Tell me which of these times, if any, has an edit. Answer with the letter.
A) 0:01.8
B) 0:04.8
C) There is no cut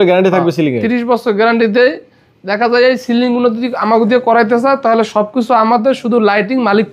C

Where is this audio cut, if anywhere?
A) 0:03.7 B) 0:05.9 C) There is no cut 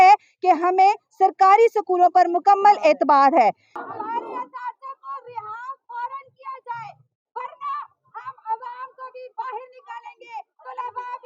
A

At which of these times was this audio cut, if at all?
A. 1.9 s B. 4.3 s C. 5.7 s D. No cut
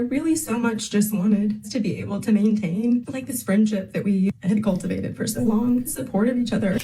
C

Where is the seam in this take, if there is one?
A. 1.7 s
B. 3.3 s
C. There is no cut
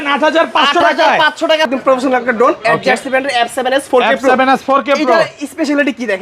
A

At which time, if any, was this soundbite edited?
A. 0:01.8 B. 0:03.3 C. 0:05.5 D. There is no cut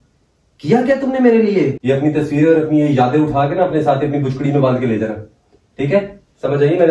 A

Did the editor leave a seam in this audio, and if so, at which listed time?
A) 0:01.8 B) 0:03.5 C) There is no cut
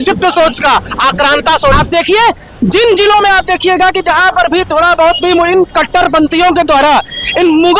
A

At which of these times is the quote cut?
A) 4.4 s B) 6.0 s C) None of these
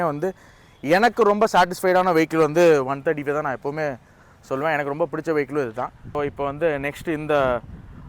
B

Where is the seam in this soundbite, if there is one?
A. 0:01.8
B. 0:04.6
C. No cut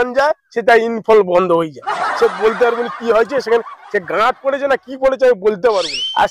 C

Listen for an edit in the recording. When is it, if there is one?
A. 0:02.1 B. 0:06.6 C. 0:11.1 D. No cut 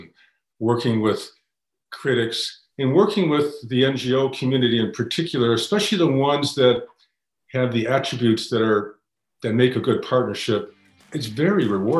C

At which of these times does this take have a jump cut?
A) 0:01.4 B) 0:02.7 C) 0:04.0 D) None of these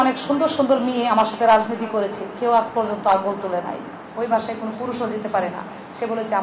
C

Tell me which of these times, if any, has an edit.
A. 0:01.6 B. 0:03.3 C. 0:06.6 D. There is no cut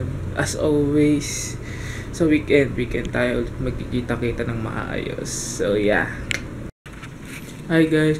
D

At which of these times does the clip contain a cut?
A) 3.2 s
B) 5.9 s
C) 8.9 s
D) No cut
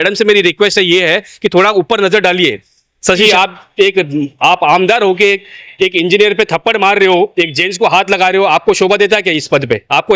A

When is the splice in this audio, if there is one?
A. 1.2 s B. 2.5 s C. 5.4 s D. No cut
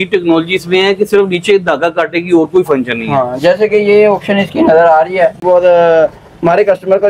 C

